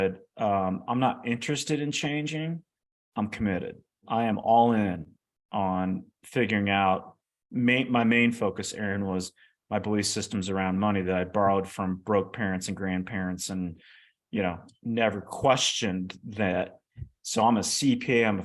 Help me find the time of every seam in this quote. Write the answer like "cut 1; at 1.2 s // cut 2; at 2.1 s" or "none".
cut 1; at 4.0 s